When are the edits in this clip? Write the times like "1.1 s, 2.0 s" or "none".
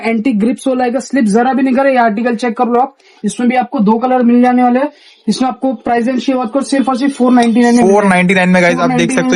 none

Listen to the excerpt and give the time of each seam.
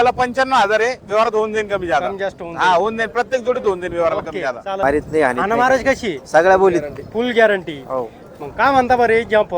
4.8 s

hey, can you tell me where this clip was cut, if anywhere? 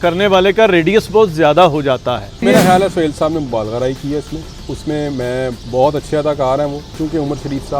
2.4 s, 5.6 s, 6.9 s

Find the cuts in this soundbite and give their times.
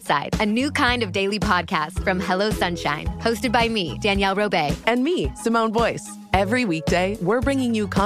none

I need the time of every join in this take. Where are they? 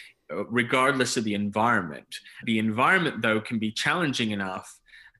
2.4 s

